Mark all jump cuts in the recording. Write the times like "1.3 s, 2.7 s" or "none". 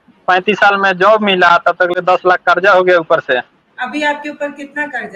3.6 s

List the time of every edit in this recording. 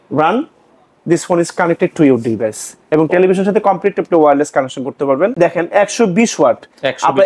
5.3 s

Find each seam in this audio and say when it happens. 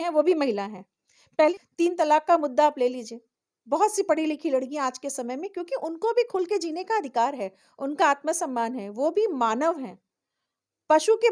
1.5 s

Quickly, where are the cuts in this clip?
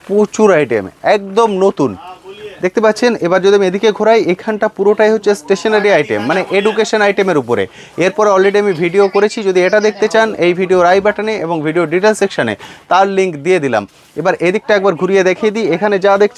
none

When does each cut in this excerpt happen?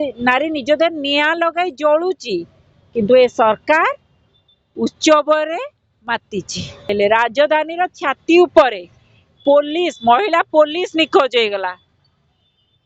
6.9 s

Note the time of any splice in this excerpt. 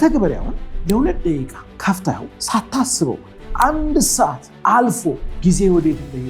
1.6 s, 2.3 s, 4.5 s, 5.3 s

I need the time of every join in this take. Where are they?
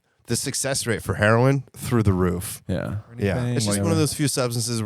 3.5 s

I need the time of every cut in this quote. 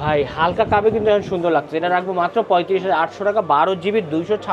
none

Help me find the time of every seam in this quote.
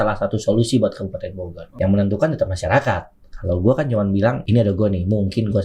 1.7 s, 4.4 s

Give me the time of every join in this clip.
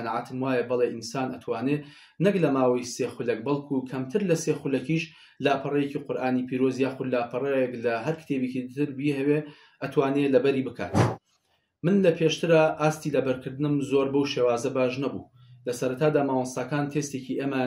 none

